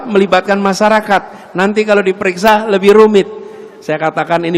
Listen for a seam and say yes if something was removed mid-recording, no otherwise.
no